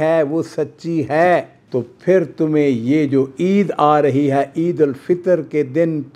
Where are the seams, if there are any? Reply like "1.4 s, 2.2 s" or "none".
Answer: 1.6 s